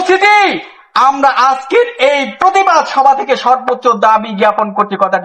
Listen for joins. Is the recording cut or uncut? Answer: uncut